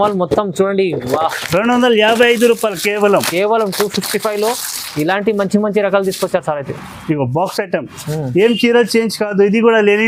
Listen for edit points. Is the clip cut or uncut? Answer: uncut